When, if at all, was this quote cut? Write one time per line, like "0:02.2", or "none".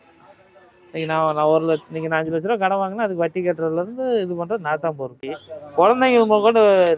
0:05.4